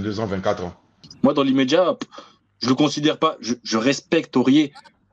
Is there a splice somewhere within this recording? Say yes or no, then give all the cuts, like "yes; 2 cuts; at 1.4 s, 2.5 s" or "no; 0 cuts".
yes; 1 cut; at 1.0 s